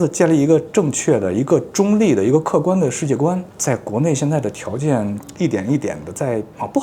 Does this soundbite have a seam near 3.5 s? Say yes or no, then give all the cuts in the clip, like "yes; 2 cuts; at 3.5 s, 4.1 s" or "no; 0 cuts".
no; 0 cuts